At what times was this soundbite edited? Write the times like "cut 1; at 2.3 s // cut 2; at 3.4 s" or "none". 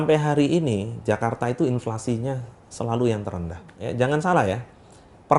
cut 1; at 3.8 s